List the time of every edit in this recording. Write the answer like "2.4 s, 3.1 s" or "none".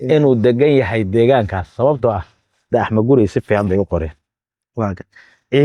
2.7 s

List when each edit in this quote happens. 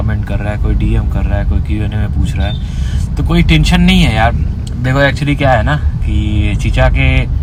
none

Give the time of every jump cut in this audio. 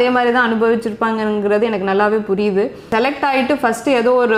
2.9 s

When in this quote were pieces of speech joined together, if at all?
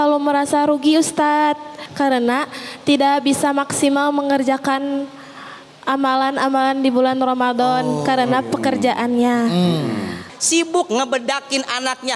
1.8 s, 10.3 s

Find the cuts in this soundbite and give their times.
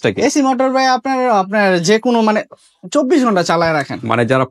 none

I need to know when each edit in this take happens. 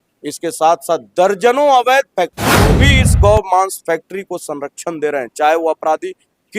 2.8 s

